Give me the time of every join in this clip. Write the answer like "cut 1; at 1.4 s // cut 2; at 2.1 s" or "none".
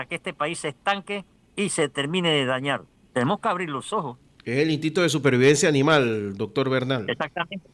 cut 1; at 1.4 s // cut 2; at 2.9 s